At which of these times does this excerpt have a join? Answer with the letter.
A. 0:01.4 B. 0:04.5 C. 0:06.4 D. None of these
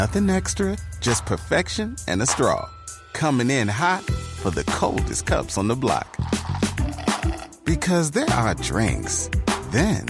D